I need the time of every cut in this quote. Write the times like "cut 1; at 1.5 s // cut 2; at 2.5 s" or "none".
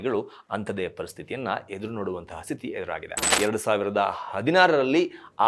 cut 1; at 3.3 s